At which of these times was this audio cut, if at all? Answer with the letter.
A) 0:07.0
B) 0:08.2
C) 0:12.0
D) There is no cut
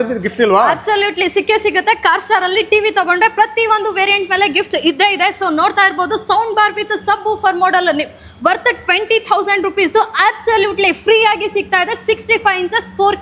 D